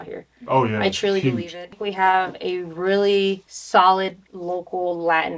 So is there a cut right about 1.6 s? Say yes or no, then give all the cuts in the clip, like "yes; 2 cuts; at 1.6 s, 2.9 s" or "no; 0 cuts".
yes; 3 cuts; at 1.6 s, 3.5 s, 4.3 s